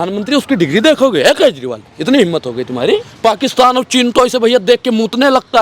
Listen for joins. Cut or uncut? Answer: cut